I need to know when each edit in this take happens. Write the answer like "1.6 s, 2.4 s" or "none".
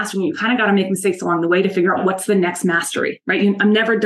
2.0 s